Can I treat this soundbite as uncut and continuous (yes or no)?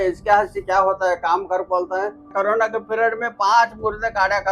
no